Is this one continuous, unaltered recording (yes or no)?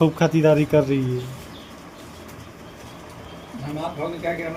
yes